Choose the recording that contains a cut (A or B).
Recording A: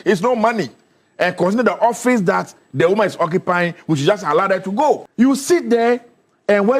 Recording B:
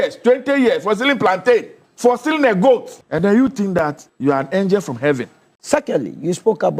B